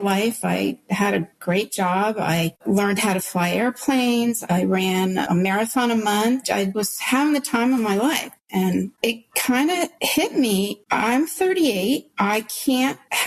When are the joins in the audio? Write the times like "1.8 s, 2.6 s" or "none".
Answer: 2.6 s, 8.4 s, 10.8 s